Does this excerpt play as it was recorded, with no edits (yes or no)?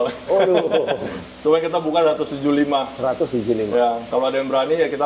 yes